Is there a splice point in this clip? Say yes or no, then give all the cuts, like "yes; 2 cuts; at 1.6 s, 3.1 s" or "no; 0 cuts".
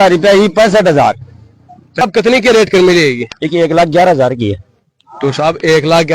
yes; 1 cut; at 2.0 s